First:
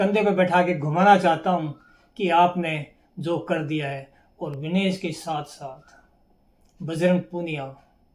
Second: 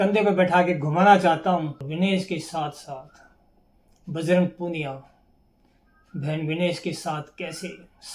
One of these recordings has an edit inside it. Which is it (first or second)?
second